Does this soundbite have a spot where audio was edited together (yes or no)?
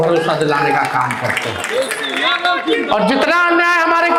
no